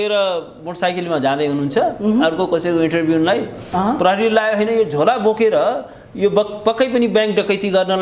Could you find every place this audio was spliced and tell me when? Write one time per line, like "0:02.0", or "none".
none